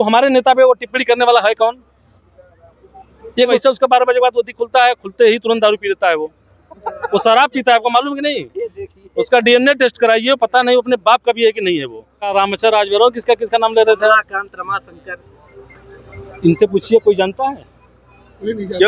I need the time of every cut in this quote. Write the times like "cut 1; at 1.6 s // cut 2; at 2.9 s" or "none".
cut 1; at 3.6 s // cut 2; at 12.3 s